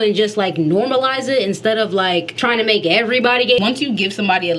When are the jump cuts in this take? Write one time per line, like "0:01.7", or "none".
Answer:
0:02.3
0:03.6